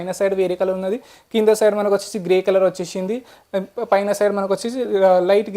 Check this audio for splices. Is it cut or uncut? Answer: uncut